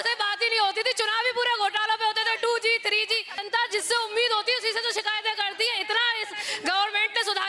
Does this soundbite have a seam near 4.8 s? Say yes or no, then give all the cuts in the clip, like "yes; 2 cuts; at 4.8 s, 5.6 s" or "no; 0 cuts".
no; 1 cut; at 3.3 s